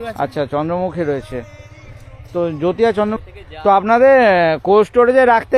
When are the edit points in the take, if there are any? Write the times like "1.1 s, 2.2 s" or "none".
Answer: 3.2 s